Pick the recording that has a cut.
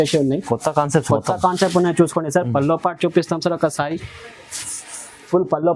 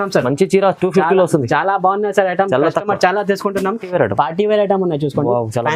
second; 1 cut; at 3.8 s

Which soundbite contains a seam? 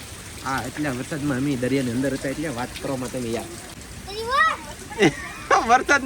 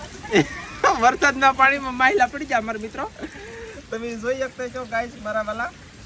first; 1 cut; at 3.8 s

